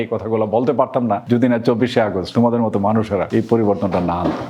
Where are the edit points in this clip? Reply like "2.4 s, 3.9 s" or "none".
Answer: 1.2 s, 2.2 s, 3.3 s